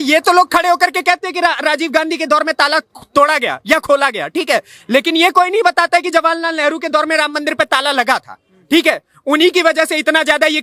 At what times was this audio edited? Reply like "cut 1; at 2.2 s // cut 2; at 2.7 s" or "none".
none